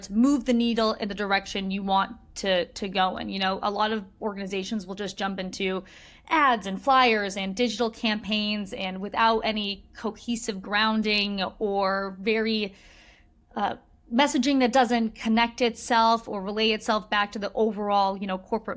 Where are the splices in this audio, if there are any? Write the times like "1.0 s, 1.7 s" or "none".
none